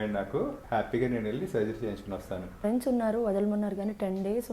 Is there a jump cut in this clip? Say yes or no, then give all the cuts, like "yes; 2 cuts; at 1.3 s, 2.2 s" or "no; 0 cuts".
yes; 1 cut; at 2.5 s